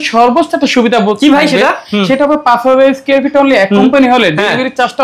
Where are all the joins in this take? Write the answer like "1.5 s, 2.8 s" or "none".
none